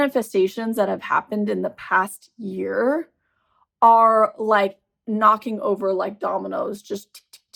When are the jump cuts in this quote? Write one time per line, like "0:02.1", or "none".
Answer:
none